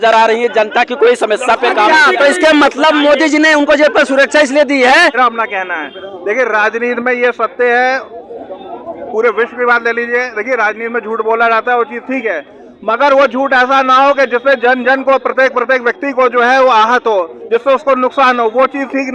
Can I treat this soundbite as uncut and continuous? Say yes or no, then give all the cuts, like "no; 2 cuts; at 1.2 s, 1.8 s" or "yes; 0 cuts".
no; 1 cut; at 5.2 s